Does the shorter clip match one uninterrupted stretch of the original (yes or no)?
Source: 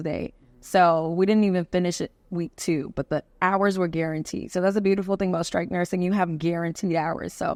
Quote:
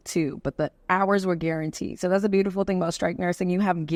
yes